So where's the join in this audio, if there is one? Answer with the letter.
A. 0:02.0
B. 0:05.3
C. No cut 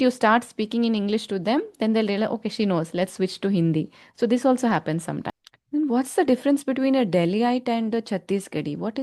B